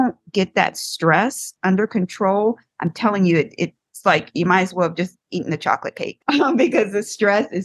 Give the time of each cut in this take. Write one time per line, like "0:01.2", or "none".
0:03.8
0:06.1